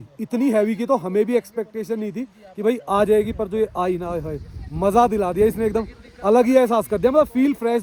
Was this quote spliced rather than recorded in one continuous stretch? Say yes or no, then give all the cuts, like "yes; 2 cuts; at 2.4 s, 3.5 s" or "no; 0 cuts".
no; 0 cuts